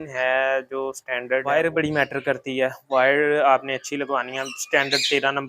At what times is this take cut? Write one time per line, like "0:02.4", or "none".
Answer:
0:01.4